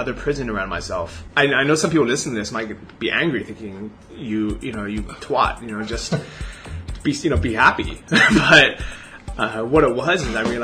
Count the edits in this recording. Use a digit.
1